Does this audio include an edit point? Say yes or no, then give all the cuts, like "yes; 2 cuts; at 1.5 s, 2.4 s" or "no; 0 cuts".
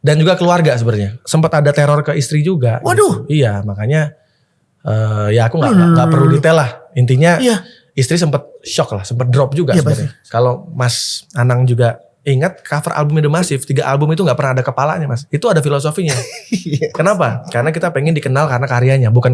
yes; 3 cuts; at 1.1 s, 10.1 s, 15.2 s